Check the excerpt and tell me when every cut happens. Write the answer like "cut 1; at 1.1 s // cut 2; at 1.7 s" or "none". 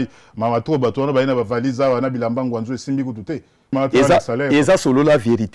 cut 1; at 3.7 s